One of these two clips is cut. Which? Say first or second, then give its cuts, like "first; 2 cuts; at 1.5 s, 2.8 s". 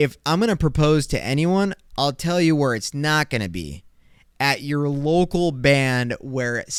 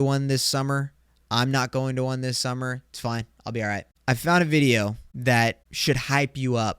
second; 3 cuts; at 3.9 s, 5.1 s, 5.7 s